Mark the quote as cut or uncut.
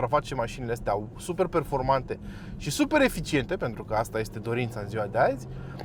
uncut